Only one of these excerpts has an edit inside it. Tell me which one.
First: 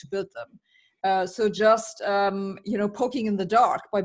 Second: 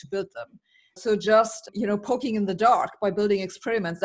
second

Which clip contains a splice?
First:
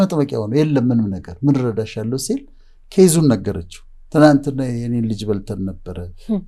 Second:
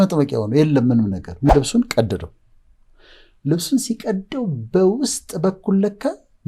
second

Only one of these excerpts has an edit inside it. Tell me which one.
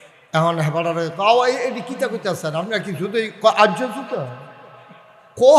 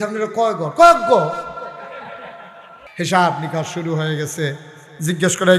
second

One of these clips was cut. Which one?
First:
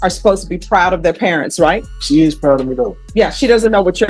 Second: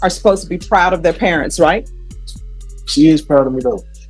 first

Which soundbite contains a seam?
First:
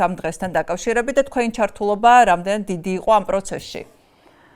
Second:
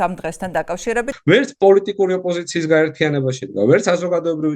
second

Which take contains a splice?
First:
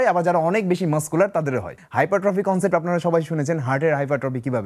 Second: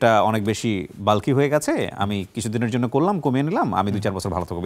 first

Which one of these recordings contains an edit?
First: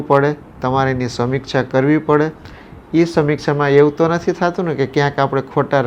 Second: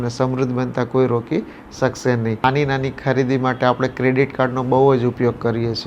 second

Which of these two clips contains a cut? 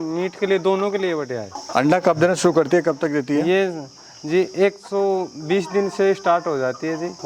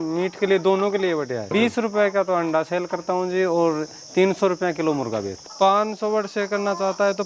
second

